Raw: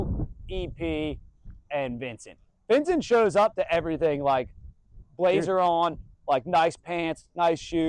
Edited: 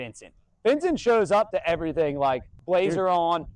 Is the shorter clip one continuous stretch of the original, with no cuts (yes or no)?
no